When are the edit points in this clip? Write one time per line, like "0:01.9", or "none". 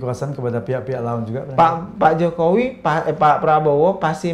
none